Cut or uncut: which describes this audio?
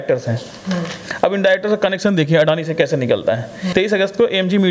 cut